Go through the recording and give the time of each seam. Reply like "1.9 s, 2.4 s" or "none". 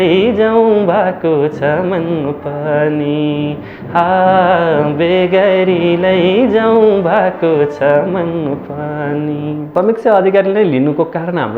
9.7 s